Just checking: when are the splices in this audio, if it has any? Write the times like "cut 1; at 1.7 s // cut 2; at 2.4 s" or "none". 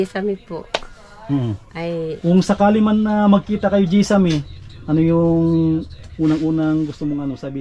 cut 1; at 2.2 s